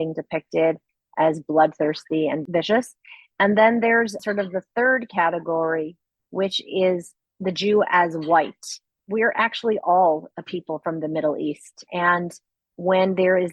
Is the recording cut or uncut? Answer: cut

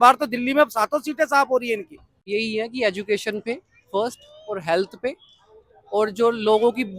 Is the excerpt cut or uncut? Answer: cut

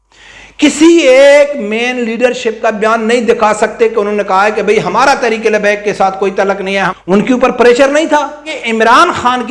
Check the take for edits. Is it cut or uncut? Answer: cut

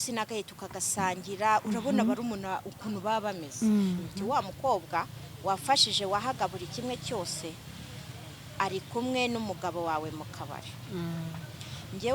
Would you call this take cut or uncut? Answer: cut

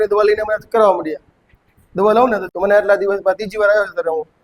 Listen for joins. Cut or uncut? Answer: cut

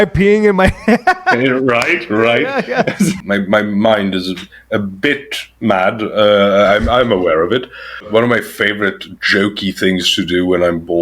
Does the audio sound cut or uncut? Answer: cut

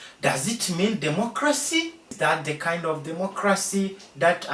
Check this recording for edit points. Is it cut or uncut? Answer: cut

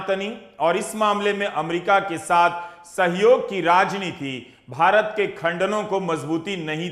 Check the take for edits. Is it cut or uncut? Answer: uncut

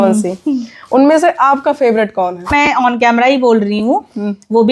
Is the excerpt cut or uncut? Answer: cut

